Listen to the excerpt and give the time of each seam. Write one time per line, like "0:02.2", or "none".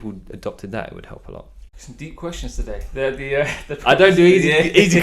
0:01.6